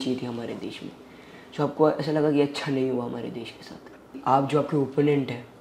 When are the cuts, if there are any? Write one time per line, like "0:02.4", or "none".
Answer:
0:04.2